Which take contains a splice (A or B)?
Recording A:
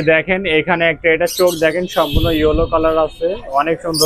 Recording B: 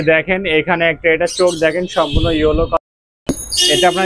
B